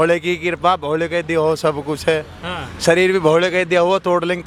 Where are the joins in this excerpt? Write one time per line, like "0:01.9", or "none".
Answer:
none